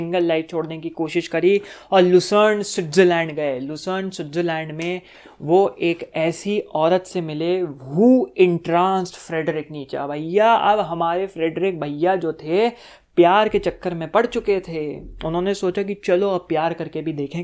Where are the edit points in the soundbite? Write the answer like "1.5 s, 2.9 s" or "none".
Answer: none